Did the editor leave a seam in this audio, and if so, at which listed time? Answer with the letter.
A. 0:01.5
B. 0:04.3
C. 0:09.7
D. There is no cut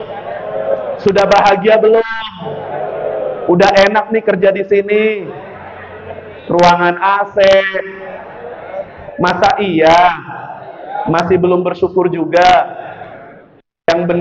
D